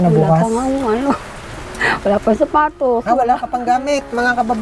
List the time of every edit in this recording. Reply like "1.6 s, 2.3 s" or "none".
none

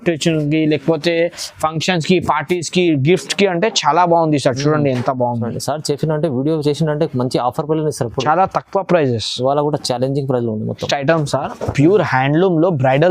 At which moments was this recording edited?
none

